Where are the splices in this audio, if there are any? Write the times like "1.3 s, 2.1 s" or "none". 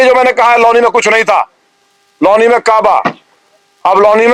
none